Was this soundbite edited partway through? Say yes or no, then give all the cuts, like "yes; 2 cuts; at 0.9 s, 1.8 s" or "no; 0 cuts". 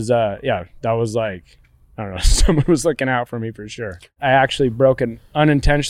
yes; 1 cut; at 4.1 s